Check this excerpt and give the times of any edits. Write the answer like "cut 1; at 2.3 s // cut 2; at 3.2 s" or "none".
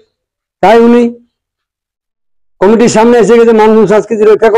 none

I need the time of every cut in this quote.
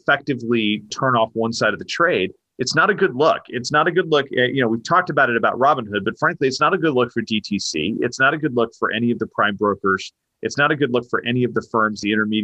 cut 1; at 0.9 s

